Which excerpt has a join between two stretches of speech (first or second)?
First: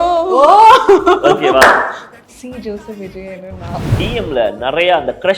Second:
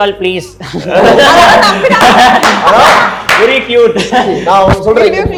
first